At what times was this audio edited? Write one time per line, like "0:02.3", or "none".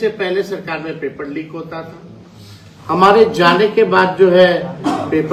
none